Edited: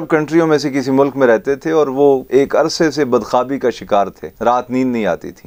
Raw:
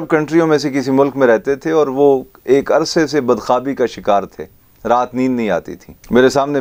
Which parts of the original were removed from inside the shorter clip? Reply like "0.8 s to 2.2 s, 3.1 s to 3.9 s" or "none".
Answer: 2.2 s to 2.4 s, 4.4 s to 4.7 s